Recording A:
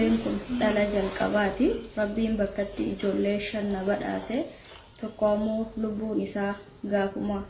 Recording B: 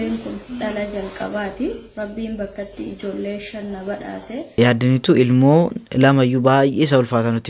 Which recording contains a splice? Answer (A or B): B